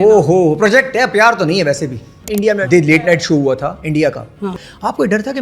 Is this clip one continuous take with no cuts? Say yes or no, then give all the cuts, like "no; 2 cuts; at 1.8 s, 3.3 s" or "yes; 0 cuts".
no; 2 cuts; at 2.5 s, 4.5 s